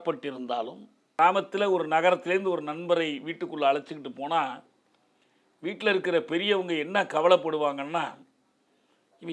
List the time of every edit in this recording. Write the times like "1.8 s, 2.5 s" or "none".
1.2 s